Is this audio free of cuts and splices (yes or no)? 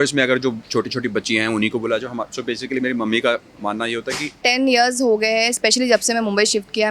no